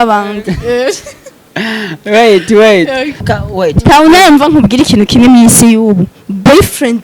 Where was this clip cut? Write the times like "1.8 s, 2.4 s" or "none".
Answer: 3.2 s